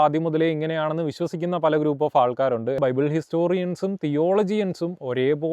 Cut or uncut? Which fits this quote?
cut